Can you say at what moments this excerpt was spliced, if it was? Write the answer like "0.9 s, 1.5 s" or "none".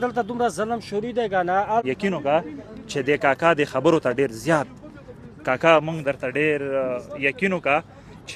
1.8 s

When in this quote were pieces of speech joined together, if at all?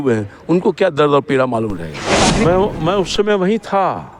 2.4 s

